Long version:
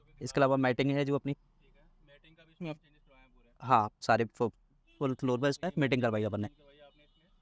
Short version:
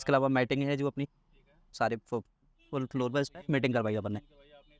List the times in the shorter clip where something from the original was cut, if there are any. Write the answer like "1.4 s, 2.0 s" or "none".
1.7 s